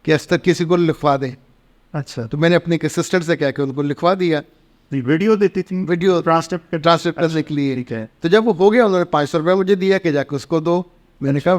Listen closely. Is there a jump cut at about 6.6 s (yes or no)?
no